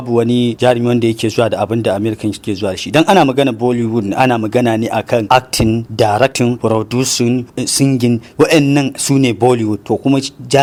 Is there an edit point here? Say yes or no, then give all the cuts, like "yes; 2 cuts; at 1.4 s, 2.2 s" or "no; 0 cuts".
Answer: no; 0 cuts